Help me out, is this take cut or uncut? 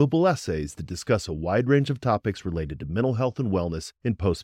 uncut